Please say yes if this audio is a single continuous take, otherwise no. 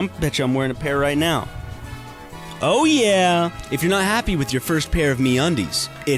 no